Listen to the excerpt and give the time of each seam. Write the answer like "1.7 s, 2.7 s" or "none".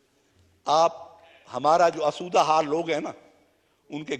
none

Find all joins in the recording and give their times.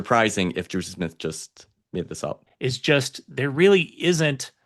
2.5 s

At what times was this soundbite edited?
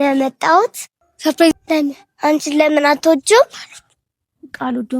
1.5 s

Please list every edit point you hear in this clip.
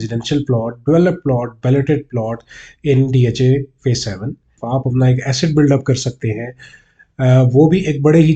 4.5 s

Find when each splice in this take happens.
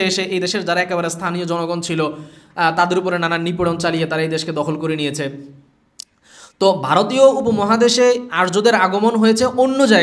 none

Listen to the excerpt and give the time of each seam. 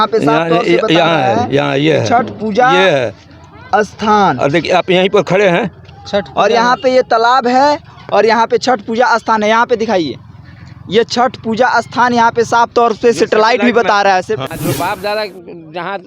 14.5 s

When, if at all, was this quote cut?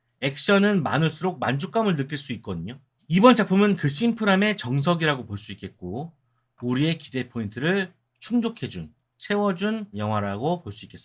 9.9 s

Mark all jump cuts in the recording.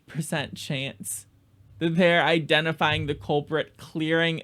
none

